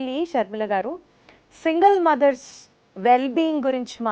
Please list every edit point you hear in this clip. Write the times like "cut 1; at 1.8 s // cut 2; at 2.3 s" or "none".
none